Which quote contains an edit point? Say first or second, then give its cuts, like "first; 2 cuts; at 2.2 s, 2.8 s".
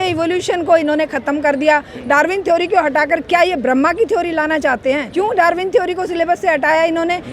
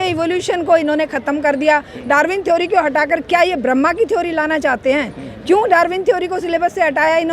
first; 1 cut; at 5.1 s